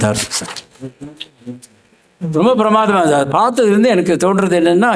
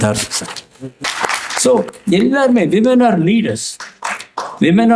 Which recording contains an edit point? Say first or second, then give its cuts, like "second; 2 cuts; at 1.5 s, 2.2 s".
second; 1 cut; at 1.1 s